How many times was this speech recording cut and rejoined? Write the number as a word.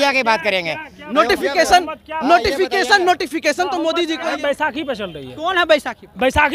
one